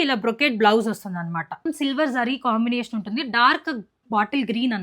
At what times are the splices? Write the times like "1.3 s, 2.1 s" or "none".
1.6 s